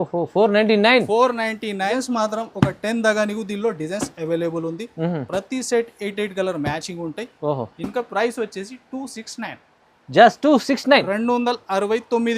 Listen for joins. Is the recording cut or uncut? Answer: cut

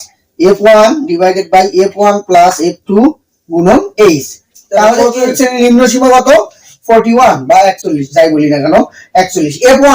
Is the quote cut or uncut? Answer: cut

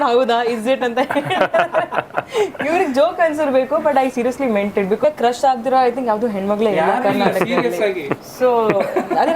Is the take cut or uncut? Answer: cut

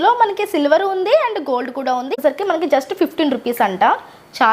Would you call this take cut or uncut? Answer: cut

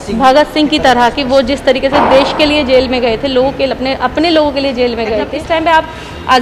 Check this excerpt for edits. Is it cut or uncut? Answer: cut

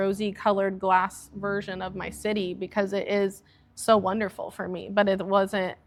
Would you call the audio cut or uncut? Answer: uncut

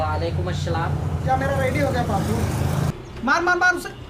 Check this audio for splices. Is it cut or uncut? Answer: cut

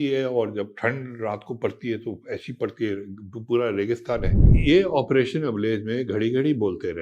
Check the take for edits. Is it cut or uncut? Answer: cut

